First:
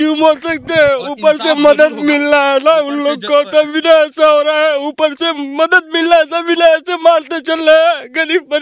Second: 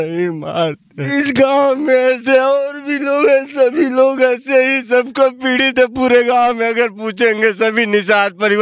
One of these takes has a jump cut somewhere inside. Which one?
second; 1 cut; at 1.0 s

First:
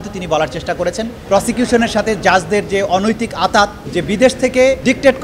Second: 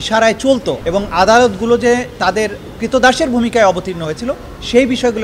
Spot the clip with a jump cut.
first; 2 cuts; at 1.2 s, 3.9 s

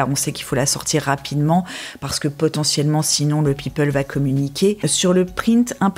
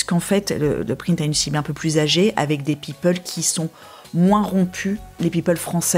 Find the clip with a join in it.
first; 1 cut; at 4.8 s

